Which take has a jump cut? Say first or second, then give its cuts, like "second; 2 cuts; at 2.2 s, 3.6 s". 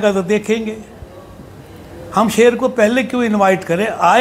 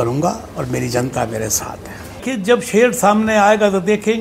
second; 1 cut; at 2.2 s